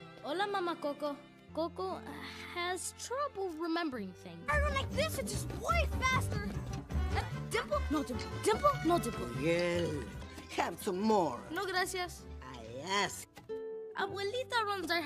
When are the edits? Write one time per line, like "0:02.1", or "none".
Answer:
0:01.3

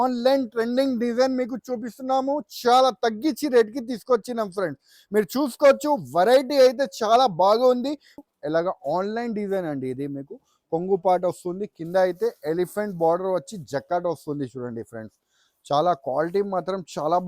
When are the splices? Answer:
0:08.2

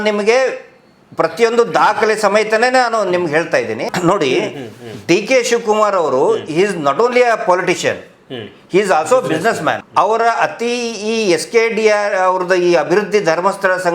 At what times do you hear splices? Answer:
0:03.9
0:09.8

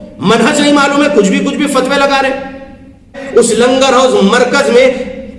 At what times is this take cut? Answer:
0:03.2

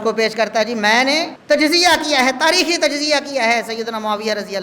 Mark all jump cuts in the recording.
0:01.3

